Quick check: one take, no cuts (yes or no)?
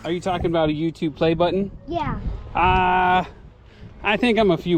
yes